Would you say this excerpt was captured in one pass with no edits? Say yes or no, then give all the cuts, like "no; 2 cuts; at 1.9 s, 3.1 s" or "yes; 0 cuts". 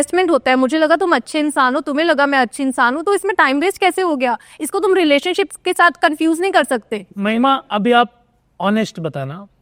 yes; 0 cuts